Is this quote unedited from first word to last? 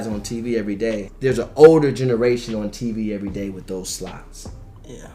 no; 1 cut; at 1.1 s

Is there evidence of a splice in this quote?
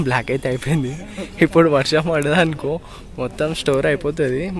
no; 0 cuts

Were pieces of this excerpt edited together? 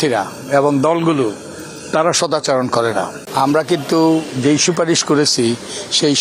yes; 1 cut; at 3.2 s

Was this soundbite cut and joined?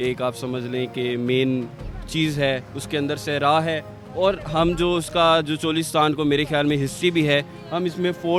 no; 0 cuts

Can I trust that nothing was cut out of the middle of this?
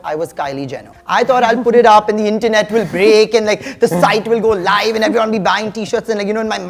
yes; 0 cuts

